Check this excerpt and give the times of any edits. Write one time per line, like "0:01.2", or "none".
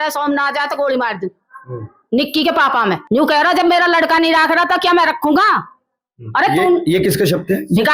0:03.0